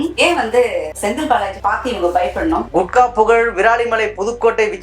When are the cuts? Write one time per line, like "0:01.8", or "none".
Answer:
0:02.6